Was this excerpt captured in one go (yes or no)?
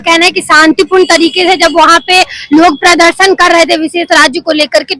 yes